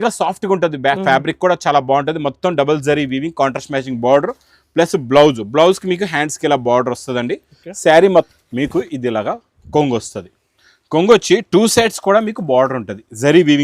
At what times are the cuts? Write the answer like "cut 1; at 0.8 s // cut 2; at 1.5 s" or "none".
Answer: cut 1; at 8.3 s